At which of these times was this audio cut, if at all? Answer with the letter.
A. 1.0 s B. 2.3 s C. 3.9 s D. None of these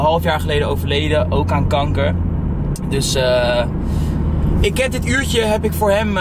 D